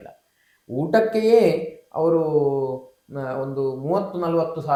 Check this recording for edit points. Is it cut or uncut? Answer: uncut